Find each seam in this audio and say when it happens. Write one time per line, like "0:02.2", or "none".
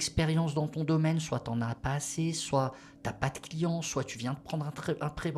none